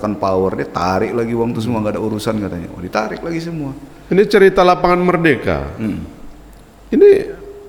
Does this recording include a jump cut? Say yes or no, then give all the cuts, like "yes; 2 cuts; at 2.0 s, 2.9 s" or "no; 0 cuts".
no; 0 cuts